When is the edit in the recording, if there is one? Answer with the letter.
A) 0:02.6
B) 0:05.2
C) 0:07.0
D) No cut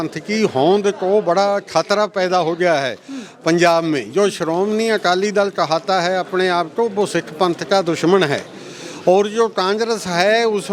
D